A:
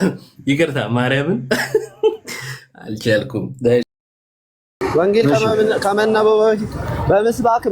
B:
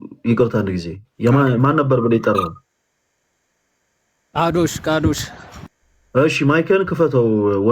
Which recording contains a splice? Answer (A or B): A